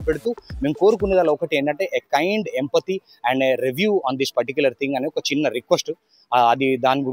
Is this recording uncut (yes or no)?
yes